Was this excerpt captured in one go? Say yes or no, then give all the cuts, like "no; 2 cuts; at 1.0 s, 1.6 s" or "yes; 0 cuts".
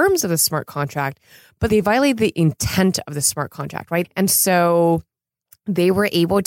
no; 2 cuts; at 1.7 s, 4.1 s